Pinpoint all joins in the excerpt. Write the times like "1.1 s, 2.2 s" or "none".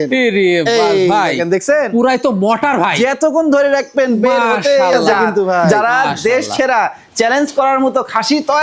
5.7 s